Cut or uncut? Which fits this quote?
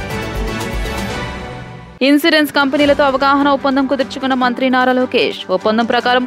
cut